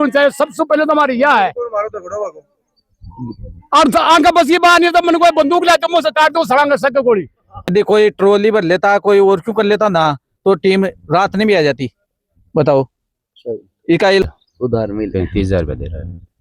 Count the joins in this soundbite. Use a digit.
2